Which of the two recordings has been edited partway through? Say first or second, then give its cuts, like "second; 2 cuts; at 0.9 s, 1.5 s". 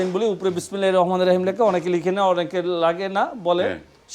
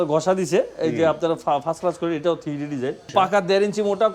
second; 1 cut; at 3.1 s